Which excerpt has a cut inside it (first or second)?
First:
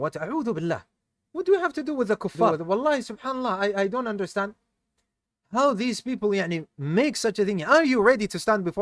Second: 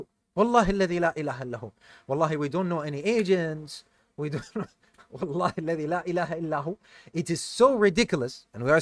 first